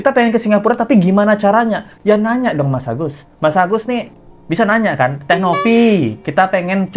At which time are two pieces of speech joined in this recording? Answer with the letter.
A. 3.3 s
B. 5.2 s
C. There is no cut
C